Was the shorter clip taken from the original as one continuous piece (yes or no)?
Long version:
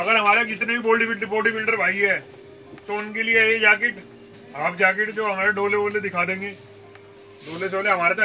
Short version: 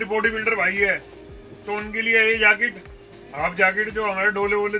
yes